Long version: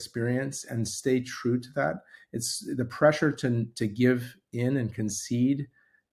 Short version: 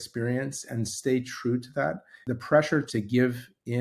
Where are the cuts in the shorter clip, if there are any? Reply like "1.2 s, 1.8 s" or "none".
2.1 s, 2.9 s